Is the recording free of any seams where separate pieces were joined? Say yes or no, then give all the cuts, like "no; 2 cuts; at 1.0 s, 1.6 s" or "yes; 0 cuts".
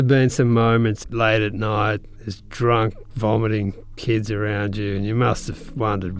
no; 1 cut; at 1.0 s